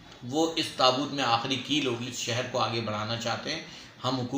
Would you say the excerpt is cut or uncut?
cut